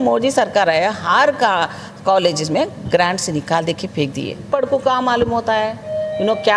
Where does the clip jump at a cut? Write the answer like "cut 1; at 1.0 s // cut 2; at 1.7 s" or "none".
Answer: cut 1; at 4.5 s